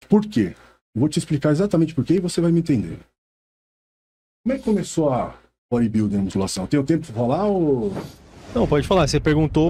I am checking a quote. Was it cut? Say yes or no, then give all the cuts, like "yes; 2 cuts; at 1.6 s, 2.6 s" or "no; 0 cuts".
no; 0 cuts